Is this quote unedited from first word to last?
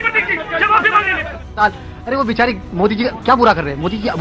no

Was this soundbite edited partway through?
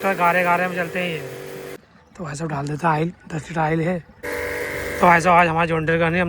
yes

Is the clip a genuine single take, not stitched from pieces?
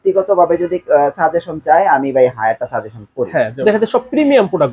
no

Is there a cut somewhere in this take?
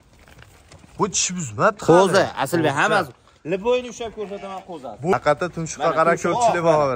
yes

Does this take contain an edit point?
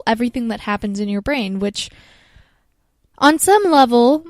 yes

